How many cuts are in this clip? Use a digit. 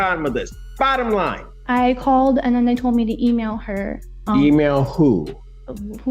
1